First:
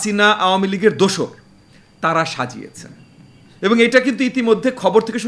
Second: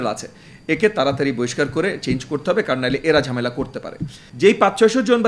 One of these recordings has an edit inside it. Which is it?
second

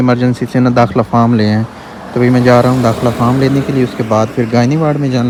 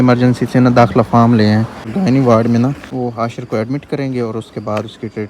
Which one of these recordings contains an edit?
second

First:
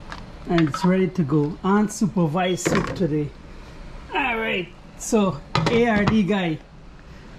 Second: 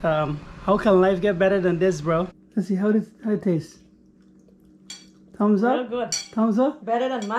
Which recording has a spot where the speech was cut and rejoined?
second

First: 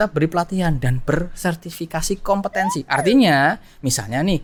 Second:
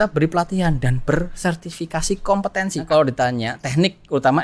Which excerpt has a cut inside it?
second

